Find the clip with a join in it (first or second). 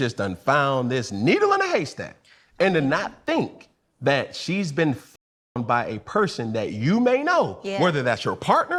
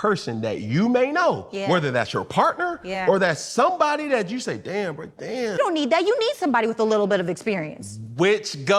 second